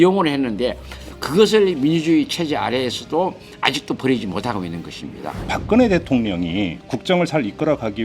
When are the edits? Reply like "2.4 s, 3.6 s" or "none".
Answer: 5.5 s, 6.8 s